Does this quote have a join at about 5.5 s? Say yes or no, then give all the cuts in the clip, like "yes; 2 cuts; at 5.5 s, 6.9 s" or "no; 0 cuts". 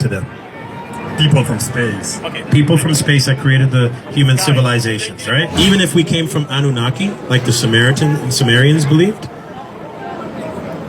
yes; 1 cut; at 5.5 s